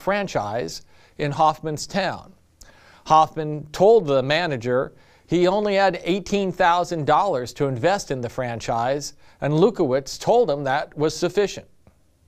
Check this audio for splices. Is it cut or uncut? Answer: cut